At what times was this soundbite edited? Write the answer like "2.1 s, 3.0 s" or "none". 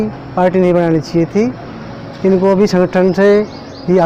none